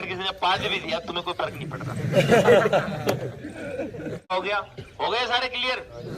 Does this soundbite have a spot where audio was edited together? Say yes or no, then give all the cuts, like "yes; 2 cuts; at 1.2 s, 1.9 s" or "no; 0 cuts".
yes; 1 cut; at 4.3 s